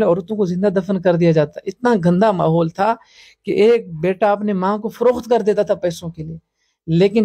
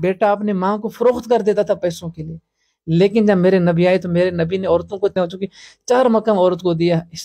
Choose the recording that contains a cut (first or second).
second